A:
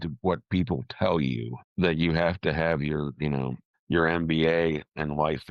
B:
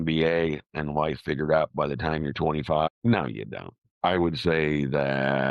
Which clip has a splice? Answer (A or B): B